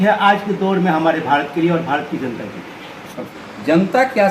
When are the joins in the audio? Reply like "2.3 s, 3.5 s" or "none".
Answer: 3.3 s